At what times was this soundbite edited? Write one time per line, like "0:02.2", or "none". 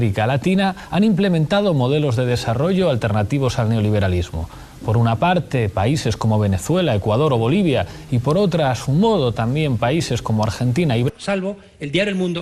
none